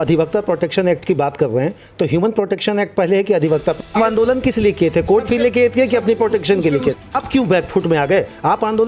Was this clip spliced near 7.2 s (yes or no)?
yes